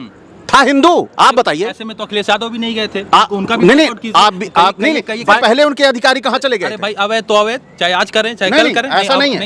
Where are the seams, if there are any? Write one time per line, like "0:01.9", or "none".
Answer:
0:05.4